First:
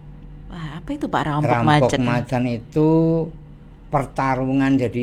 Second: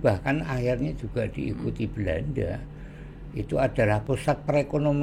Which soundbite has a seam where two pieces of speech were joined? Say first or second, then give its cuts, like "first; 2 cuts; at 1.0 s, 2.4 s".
second; 1 cut; at 4.0 s